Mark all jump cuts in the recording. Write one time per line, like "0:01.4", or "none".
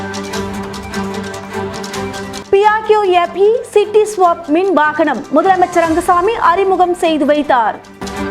0:02.4